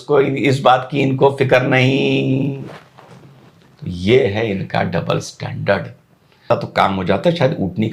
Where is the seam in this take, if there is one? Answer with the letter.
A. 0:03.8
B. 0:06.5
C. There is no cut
B